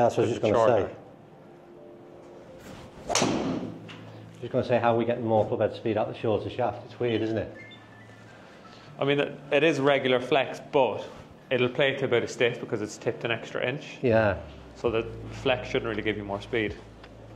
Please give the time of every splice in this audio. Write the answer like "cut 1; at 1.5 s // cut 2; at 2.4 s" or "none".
none